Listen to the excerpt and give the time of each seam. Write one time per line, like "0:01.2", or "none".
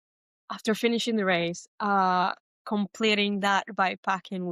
0:01.7